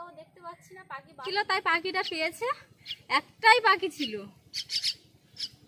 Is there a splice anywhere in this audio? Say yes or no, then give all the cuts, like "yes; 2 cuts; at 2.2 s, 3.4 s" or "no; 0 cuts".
yes; 1 cut; at 1.2 s